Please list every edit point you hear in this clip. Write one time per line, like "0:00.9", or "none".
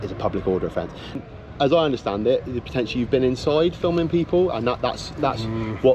0:01.2